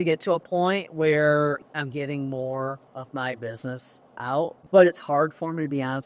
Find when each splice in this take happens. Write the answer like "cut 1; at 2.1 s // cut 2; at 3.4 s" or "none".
cut 1; at 1.6 s // cut 2; at 2.9 s // cut 3; at 4.6 s